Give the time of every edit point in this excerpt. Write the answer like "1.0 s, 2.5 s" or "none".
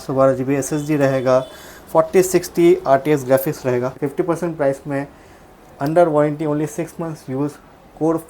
3.9 s